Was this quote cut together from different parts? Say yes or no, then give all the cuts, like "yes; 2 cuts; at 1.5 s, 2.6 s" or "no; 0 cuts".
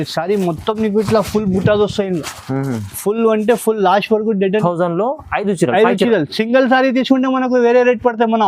yes; 1 cut; at 4.6 s